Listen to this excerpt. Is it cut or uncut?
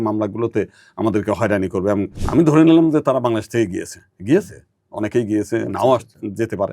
cut